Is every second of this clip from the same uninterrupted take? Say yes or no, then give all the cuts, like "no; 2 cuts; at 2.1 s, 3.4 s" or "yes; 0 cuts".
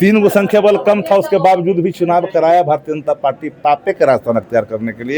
yes; 0 cuts